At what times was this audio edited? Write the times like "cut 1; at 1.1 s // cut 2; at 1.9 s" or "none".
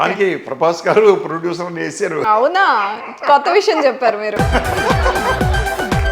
cut 1; at 2.2 s // cut 2; at 4.3 s